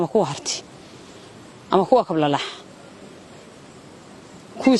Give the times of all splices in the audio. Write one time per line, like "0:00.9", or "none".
none